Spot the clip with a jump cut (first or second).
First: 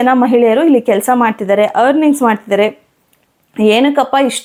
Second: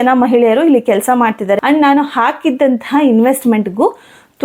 second